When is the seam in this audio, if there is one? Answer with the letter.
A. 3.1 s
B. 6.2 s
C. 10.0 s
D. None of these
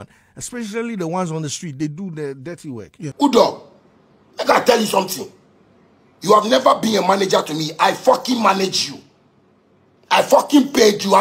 A